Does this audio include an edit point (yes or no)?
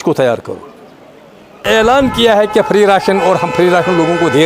yes